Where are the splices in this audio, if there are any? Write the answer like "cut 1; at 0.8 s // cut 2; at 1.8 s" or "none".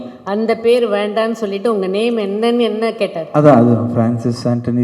none